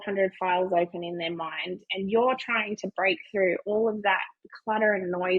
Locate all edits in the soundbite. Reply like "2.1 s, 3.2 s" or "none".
none